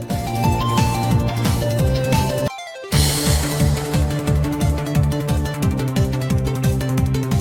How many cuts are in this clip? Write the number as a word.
zero